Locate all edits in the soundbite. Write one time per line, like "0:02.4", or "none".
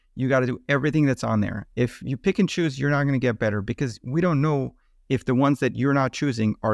0:01.6